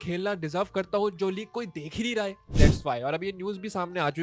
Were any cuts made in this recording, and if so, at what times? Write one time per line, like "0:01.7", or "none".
0:02.6